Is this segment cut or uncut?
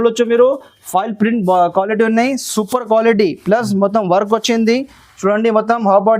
uncut